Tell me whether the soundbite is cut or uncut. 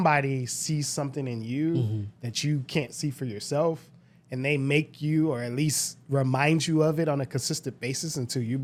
uncut